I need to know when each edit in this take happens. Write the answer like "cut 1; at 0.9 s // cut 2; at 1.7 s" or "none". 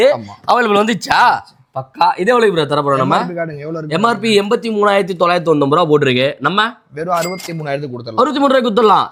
none